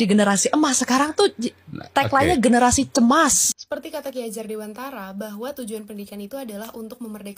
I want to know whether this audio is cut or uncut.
cut